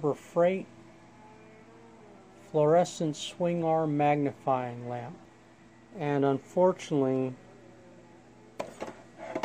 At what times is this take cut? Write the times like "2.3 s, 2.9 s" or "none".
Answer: 5.2 s